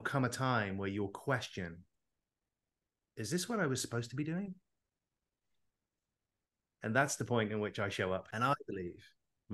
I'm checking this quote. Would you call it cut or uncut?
cut